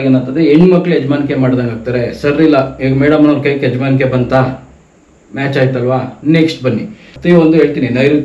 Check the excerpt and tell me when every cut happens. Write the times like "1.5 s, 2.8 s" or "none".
7.1 s